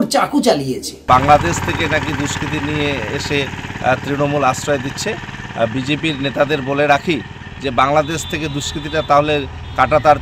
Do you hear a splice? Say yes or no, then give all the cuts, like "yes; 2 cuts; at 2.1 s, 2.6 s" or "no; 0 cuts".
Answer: yes; 1 cut; at 1.0 s